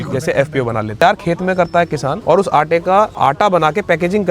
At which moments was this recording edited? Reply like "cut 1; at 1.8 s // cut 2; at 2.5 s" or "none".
cut 1; at 1.0 s // cut 2; at 2.2 s // cut 3; at 3.1 s